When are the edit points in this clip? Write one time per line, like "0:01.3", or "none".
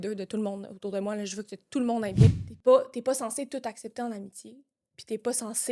0:02.3